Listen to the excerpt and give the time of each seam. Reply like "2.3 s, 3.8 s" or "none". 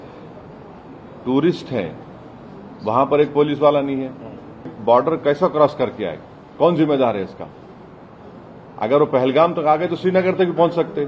4.7 s